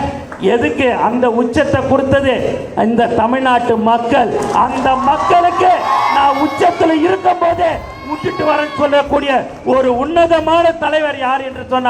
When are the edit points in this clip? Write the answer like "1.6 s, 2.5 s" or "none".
none